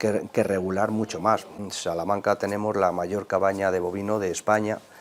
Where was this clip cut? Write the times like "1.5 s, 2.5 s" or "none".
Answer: 1.6 s